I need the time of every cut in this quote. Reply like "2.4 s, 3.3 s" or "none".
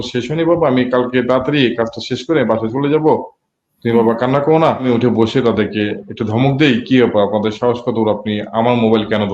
4.8 s